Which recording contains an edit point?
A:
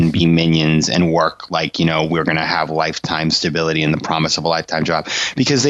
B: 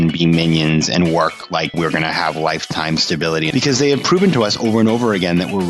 B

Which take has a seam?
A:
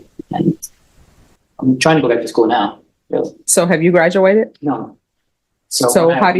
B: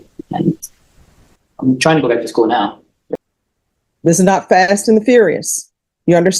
B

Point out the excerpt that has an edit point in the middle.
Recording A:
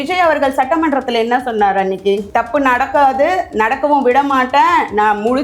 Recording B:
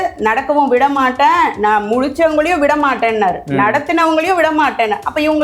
A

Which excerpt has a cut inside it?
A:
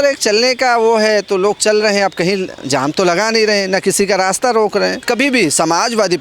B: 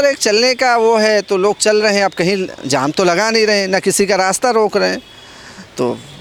A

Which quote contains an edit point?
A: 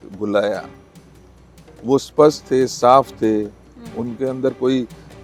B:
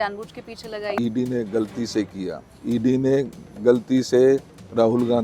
B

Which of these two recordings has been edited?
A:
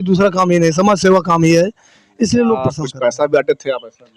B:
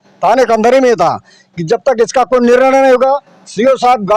A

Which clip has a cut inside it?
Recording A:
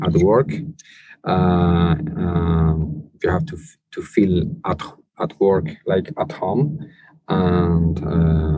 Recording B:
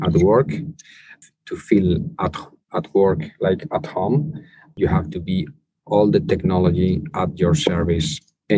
B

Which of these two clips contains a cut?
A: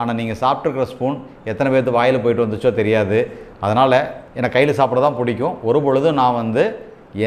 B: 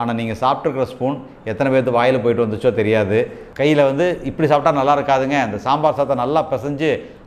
B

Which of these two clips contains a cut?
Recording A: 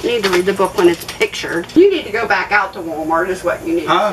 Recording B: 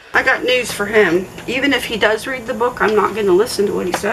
A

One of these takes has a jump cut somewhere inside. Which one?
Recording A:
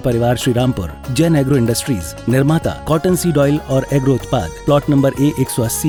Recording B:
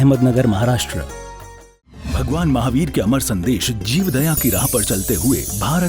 B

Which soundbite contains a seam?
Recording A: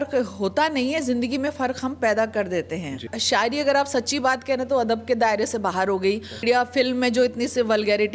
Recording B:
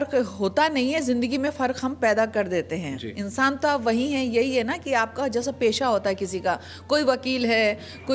A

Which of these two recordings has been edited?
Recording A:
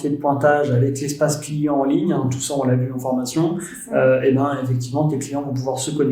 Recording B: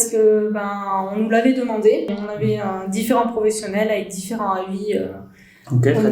B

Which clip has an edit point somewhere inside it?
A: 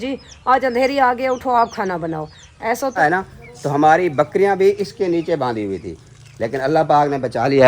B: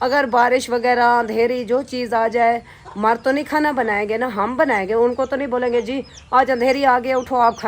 A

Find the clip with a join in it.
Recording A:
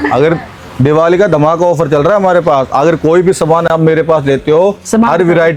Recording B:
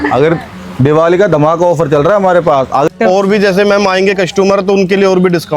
B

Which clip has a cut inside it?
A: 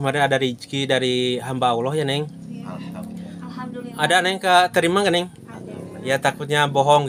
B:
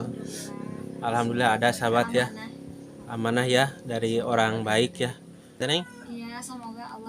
B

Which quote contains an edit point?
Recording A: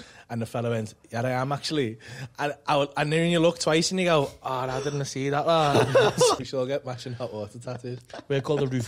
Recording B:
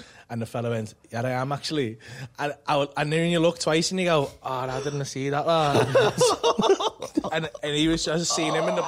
A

